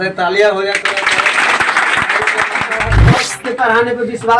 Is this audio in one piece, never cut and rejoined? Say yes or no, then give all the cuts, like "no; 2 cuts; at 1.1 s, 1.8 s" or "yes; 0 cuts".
no; 1 cut; at 3.3 s